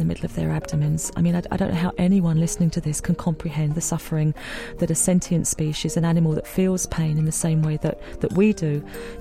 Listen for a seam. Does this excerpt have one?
no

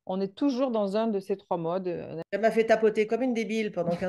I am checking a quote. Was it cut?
yes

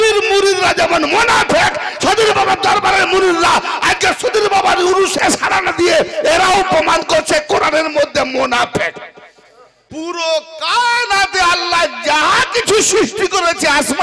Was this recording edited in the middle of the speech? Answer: yes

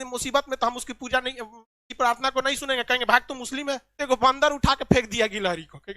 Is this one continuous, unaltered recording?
no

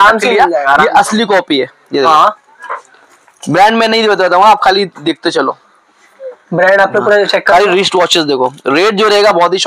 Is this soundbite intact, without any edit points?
yes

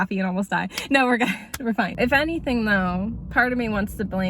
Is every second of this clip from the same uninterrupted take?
no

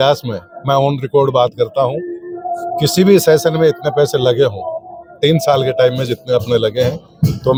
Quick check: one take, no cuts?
yes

